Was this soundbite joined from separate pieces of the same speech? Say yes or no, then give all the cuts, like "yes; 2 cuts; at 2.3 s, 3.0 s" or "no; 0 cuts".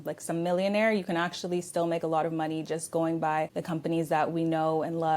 yes; 1 cut; at 3.6 s